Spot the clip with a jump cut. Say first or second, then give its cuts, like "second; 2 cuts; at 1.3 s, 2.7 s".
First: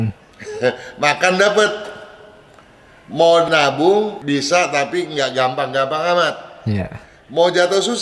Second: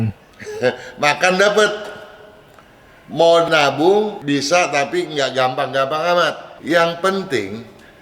second; 1 cut; at 6.5 s